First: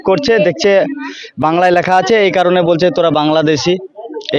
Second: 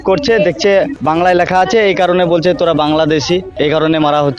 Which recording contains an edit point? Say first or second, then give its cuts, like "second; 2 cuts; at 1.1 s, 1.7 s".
second; 2 cuts; at 1.0 s, 3.5 s